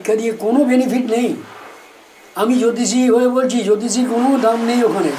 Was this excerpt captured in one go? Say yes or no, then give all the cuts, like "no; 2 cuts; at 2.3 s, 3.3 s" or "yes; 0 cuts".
yes; 0 cuts